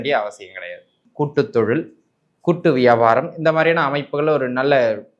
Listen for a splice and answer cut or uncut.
cut